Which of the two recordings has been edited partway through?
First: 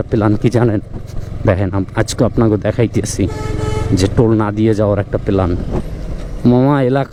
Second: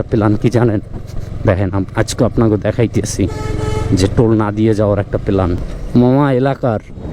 second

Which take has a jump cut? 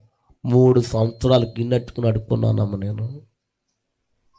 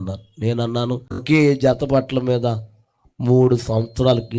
second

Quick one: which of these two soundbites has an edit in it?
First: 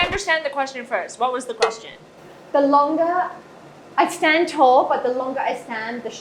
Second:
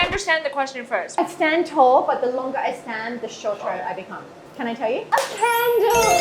second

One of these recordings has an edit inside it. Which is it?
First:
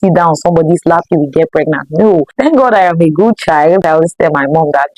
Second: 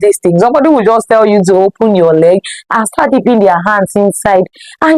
first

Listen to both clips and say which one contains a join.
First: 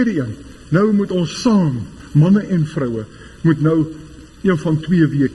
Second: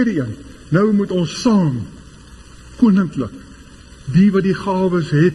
first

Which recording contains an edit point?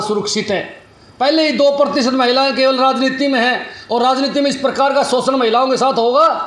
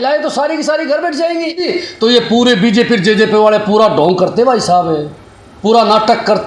second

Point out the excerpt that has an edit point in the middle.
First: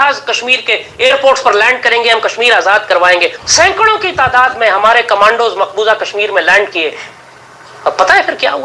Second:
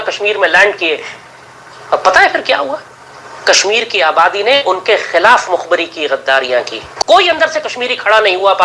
second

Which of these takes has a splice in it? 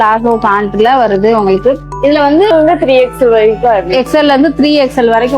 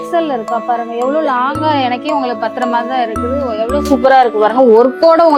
first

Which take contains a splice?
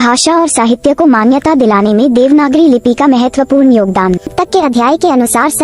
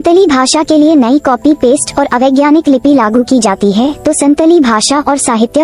first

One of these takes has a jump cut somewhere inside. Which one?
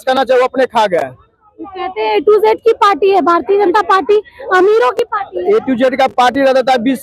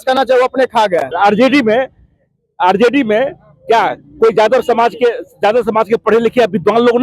second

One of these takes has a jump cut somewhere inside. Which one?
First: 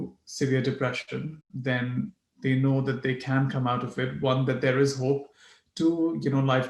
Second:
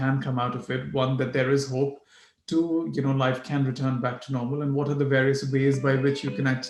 first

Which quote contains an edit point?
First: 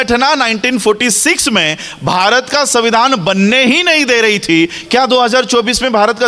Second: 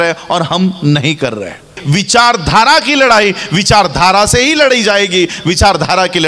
second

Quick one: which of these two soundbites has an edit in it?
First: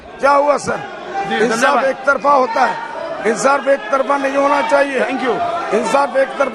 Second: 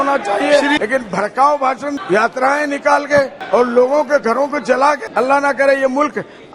second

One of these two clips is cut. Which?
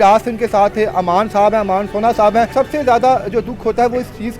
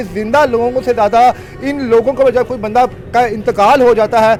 first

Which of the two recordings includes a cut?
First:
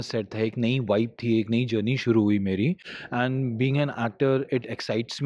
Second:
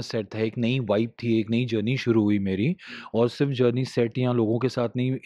first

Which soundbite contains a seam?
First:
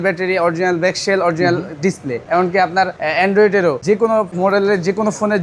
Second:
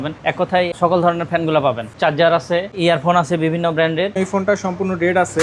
second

